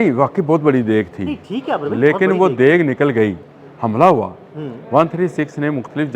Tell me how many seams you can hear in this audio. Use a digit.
1